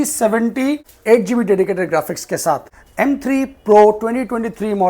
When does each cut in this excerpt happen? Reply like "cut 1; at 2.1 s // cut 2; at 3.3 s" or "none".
cut 1; at 0.9 s // cut 2; at 2.8 s